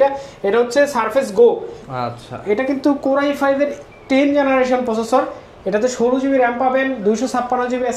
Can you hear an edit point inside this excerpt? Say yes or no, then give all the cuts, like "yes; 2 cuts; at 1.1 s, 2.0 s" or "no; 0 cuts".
no; 0 cuts